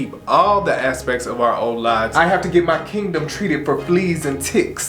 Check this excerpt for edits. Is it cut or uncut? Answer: cut